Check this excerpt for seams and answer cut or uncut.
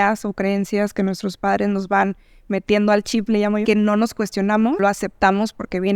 cut